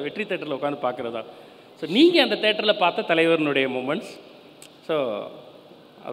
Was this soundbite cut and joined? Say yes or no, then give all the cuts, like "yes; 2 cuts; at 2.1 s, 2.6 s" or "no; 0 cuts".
no; 0 cuts